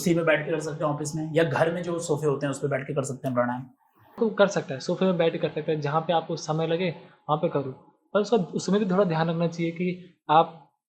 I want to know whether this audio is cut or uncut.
cut